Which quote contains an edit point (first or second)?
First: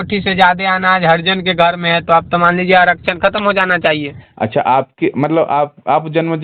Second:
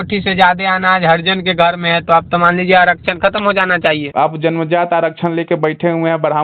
second